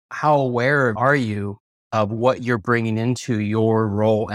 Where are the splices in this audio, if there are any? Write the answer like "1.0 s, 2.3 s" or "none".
0.9 s